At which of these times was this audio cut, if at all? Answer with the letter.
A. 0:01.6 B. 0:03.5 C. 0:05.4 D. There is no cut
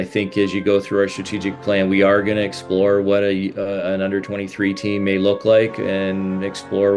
D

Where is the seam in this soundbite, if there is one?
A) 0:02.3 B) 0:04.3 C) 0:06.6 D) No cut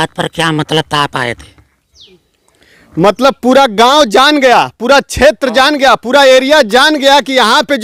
D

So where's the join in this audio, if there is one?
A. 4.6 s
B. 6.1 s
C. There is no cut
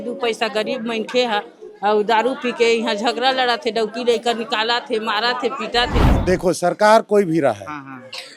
B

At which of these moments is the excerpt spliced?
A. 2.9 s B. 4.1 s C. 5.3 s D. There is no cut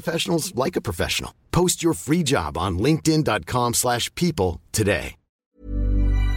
C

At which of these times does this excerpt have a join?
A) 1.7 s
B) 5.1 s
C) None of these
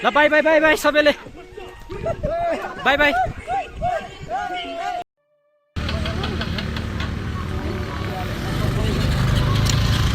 B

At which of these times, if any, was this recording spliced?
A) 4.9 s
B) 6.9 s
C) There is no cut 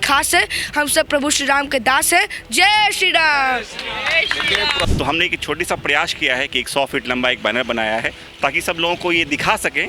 A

